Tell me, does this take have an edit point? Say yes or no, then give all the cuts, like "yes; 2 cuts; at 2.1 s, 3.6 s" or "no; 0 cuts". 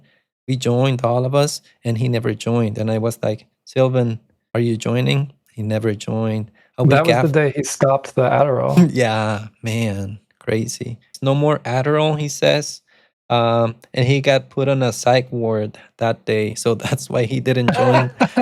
yes; 1 cut; at 11.1 s